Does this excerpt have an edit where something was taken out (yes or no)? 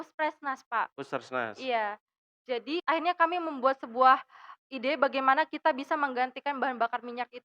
yes